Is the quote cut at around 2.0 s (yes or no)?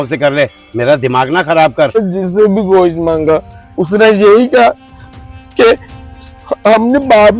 yes